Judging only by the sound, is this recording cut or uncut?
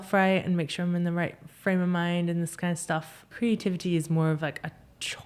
cut